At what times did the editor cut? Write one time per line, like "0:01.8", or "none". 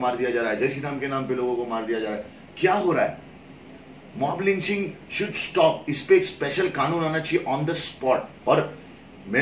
0:08.3